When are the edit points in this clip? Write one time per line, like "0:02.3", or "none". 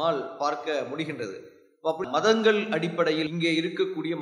0:02.0

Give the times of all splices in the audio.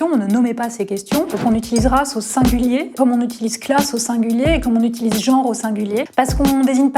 0:01.3
0:02.9
0:06.1

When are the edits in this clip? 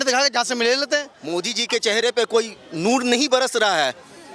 0:01.2

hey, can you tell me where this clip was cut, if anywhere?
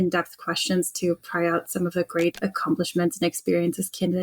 0:02.4

